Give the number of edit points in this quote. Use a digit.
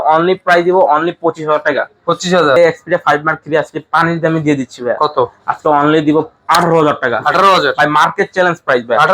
1